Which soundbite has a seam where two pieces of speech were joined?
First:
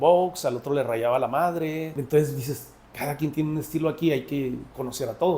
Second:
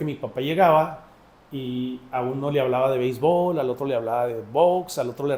first; 1 cut; at 1.9 s

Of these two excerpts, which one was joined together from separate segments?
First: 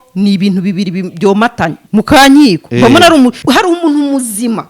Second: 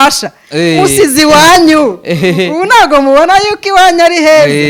first; 2 cuts; at 1.8 s, 3.4 s

